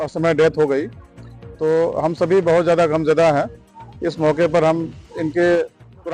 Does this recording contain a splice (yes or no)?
no